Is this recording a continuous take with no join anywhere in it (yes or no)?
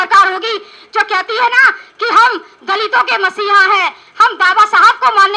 yes